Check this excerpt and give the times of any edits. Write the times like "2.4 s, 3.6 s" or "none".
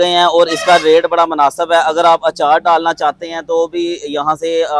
none